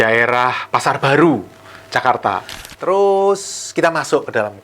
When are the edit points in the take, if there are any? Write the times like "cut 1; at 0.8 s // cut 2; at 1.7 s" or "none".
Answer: cut 1; at 2.5 s